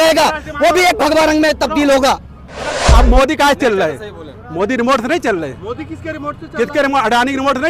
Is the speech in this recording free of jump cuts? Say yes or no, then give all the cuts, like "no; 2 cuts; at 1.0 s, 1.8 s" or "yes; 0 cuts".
no; 1 cut; at 2.8 s